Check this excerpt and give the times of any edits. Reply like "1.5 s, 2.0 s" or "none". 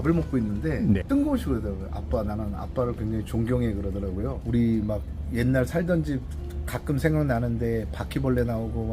1.0 s, 4.4 s